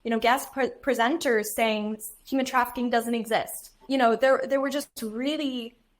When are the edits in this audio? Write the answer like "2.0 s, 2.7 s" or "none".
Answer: 3.8 s